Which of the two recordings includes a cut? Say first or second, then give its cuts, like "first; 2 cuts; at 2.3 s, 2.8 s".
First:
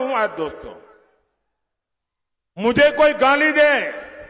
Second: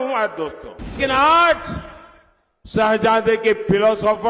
second; 1 cut; at 1.0 s